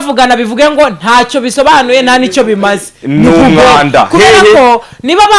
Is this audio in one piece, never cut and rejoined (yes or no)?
yes